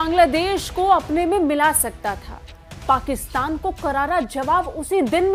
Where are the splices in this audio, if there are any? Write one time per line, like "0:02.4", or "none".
none